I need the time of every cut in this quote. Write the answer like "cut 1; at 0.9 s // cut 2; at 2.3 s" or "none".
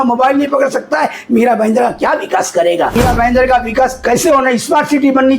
cut 1; at 3.0 s